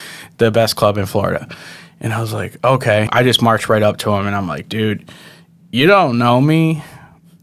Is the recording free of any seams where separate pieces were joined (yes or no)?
no